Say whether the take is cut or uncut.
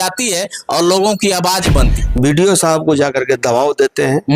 cut